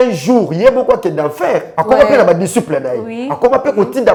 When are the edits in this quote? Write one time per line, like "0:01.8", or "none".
none